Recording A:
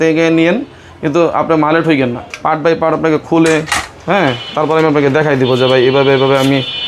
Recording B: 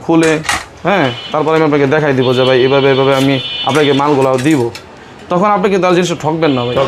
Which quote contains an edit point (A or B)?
A